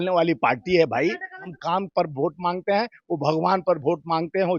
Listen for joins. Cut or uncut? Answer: cut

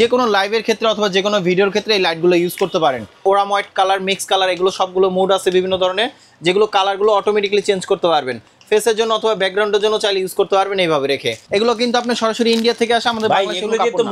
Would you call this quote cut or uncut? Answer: cut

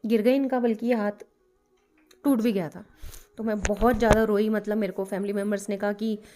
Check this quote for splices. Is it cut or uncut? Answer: uncut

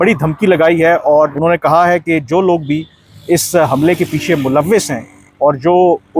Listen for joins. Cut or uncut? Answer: cut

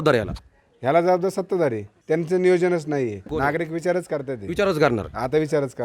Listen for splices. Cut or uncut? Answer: cut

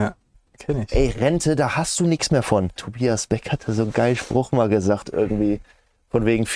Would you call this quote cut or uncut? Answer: cut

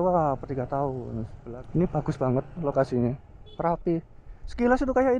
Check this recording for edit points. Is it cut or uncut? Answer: cut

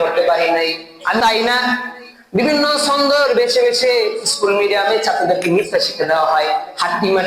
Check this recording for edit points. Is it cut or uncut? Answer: cut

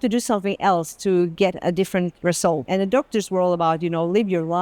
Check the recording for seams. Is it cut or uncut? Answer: cut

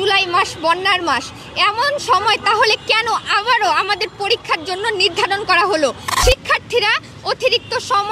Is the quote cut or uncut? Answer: cut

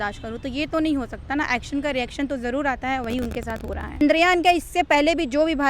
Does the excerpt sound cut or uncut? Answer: cut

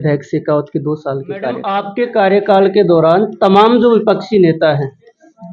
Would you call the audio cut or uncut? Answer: cut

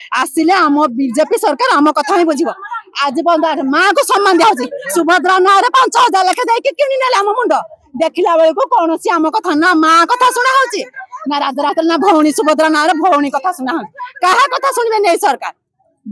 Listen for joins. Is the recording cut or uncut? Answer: uncut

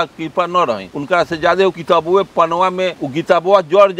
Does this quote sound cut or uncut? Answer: cut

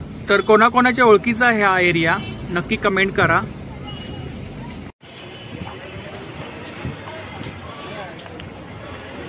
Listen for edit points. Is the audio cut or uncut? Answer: uncut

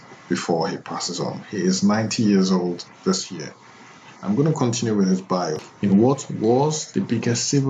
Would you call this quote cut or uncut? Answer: cut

